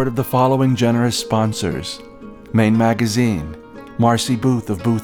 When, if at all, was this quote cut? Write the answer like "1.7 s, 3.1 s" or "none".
none